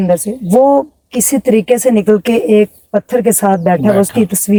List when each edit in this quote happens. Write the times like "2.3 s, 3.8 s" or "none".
none